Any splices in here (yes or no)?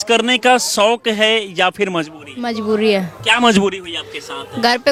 no